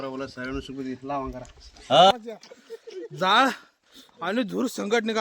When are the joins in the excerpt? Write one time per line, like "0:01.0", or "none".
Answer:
0:02.1